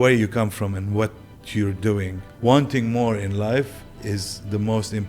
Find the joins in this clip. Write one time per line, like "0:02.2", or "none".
0:02.2